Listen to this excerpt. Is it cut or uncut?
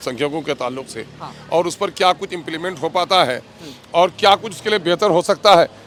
uncut